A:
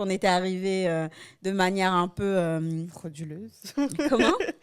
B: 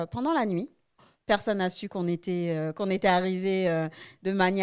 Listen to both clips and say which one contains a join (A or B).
B